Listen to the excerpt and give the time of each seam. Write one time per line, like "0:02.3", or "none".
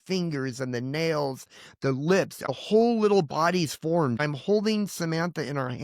0:02.5
0:04.2